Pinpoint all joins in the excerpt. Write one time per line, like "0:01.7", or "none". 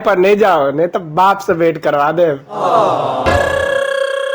0:03.4